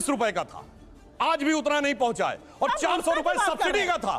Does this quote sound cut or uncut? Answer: uncut